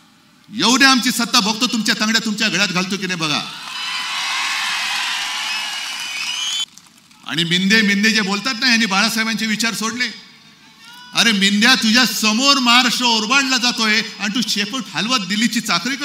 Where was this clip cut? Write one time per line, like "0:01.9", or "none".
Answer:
0:06.7